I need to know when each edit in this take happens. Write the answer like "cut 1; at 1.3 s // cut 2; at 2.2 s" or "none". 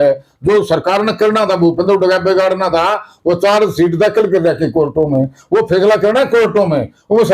cut 1; at 5.1 s